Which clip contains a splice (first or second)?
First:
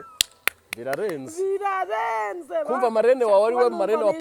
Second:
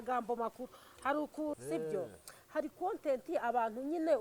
second